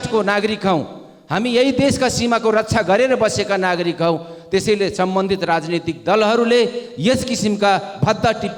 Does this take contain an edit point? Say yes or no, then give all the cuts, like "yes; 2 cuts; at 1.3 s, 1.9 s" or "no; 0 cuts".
no; 0 cuts